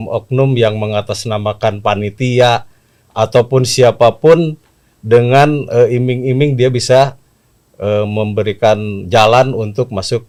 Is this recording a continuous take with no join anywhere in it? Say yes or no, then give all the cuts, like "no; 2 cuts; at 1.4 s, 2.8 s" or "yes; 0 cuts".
yes; 0 cuts